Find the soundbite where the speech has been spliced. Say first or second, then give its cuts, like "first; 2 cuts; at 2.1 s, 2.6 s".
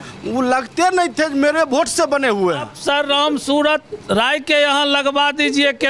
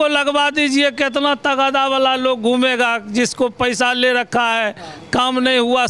first; 1 cut; at 2.7 s